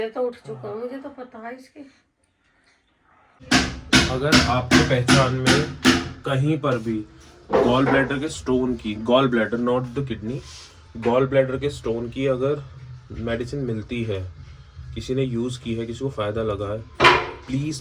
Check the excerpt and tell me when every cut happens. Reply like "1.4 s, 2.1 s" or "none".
3.4 s